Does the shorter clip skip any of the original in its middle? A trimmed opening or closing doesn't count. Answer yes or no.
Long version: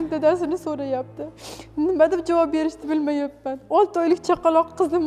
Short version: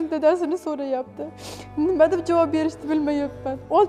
no